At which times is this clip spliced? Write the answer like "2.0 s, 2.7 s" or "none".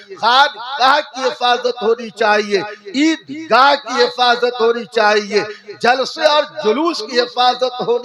none

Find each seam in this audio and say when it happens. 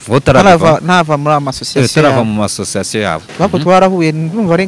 3.2 s

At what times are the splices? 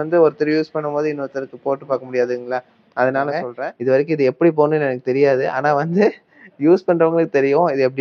3.6 s

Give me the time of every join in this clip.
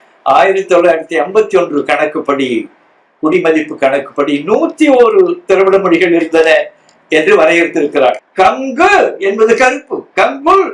8.2 s

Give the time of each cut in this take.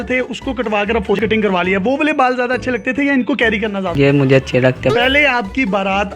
1.2 s, 4.9 s

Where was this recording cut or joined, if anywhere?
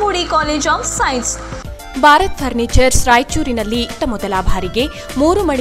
1.2 s

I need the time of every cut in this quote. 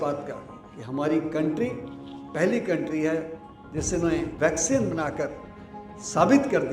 4.3 s

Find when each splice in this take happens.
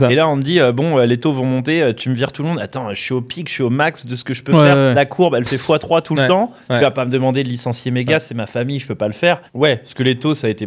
4.9 s, 9.5 s

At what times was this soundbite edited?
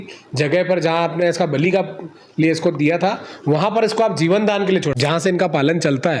4.9 s

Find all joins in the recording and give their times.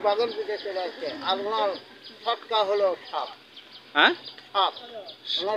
none

